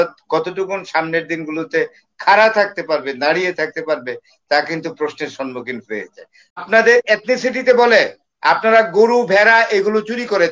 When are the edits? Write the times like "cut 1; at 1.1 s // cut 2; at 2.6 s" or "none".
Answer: cut 1; at 6.6 s